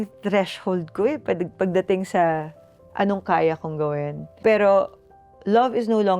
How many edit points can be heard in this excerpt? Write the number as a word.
one